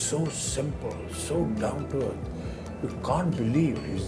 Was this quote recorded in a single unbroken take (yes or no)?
yes